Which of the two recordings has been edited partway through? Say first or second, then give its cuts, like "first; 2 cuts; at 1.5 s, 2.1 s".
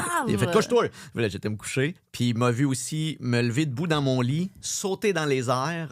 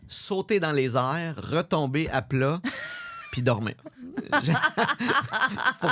first; 1 cut; at 2.0 s